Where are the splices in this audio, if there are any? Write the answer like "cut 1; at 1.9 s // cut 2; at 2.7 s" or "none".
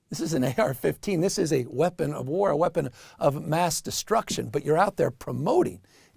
cut 1; at 2.7 s